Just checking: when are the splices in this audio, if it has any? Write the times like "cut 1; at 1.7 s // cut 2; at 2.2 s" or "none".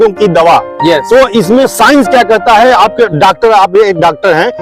none